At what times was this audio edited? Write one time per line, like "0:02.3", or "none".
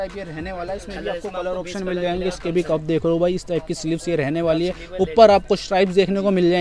none